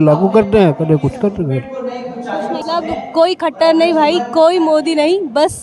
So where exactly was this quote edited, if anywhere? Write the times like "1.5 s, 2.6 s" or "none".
2.6 s